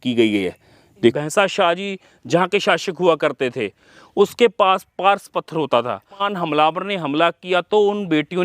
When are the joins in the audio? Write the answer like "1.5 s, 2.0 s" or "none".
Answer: 1.2 s, 6.3 s